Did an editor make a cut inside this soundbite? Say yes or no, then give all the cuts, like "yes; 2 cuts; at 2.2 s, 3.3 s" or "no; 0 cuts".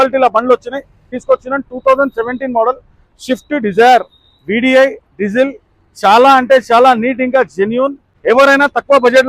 yes; 2 cuts; at 1.1 s, 8.1 s